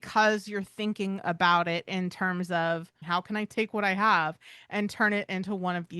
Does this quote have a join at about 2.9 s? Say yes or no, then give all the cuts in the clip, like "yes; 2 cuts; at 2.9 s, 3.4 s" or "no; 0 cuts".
yes; 1 cut; at 2.9 s